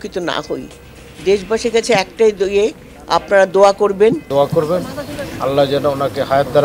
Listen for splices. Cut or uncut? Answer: cut